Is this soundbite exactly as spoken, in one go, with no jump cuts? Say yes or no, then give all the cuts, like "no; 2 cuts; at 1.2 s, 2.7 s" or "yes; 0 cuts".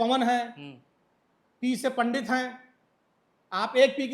yes; 0 cuts